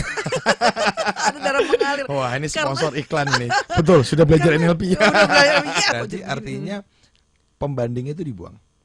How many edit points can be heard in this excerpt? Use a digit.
1